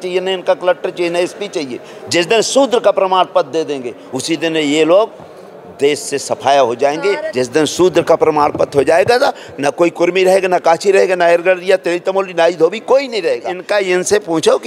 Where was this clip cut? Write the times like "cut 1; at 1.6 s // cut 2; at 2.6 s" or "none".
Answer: cut 1; at 7.2 s // cut 2; at 13.6 s